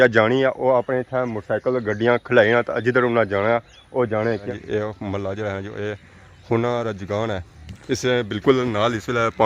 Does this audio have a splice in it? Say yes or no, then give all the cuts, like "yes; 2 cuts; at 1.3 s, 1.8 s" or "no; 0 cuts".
yes; 1 cut; at 4.4 s